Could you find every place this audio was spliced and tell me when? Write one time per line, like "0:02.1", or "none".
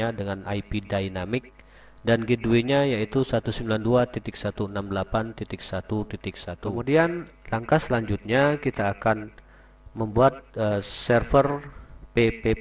0:06.7